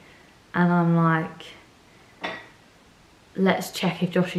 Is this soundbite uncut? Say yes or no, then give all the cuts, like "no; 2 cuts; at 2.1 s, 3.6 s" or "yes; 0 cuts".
yes; 0 cuts